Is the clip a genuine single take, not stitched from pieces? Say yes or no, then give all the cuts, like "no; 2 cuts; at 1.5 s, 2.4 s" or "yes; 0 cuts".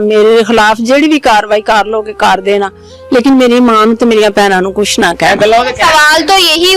yes; 0 cuts